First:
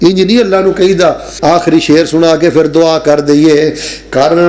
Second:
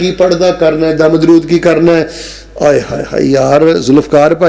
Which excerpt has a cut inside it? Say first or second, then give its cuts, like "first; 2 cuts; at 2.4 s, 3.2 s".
first; 1 cut; at 1.3 s